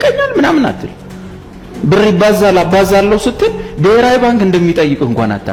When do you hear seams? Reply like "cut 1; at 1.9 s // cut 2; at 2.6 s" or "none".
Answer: none